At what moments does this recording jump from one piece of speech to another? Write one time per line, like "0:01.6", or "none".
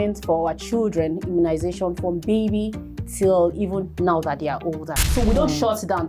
0:05.0